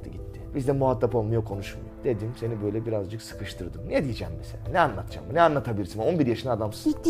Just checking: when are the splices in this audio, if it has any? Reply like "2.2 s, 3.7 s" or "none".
none